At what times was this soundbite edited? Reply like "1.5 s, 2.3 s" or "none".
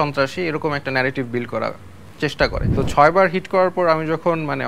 2.7 s